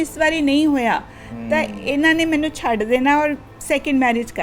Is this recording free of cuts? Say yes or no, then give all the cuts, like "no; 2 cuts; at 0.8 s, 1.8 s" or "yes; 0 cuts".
yes; 0 cuts